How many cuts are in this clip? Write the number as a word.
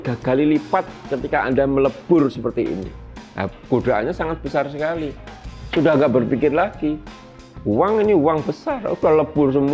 zero